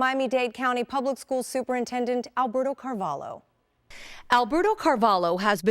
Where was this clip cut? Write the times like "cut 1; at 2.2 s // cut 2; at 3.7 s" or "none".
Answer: cut 1; at 3.9 s